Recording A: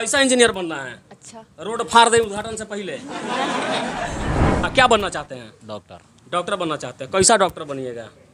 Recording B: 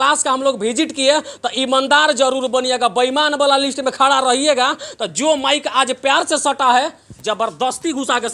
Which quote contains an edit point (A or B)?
A